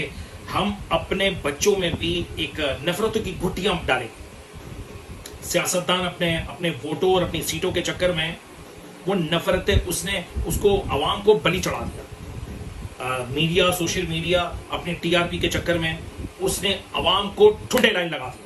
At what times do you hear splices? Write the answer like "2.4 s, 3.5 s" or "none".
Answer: none

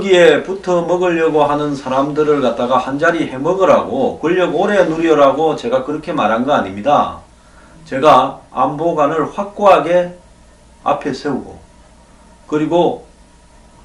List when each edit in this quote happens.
1.0 s

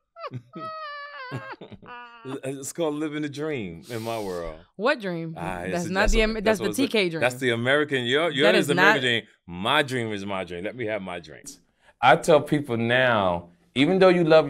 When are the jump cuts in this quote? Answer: 11.4 s

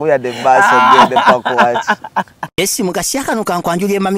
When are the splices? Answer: 2.5 s

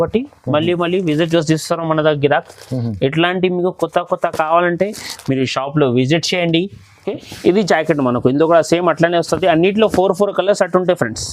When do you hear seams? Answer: 7.1 s

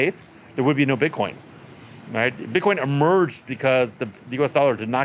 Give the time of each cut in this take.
none

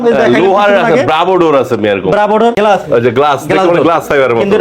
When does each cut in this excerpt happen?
2.6 s

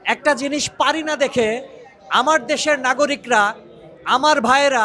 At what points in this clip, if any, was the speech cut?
none

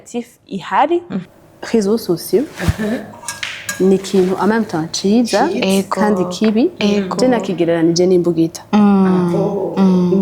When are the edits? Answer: 1.2 s

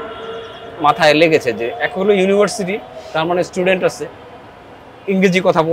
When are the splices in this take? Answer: none

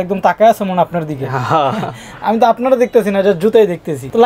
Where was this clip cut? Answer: none

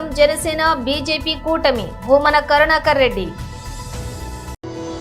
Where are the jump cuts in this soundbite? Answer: 3.4 s

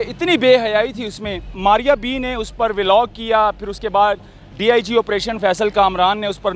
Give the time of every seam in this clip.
1.5 s

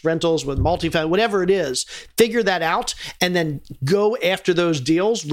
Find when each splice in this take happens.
none

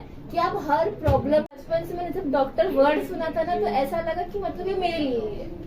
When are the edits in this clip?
1.6 s

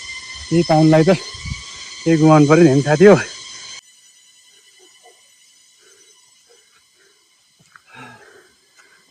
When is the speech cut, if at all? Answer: 3.8 s

